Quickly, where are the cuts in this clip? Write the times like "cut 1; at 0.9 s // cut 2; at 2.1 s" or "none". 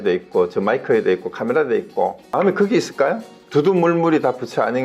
cut 1; at 2.3 s // cut 2; at 3.3 s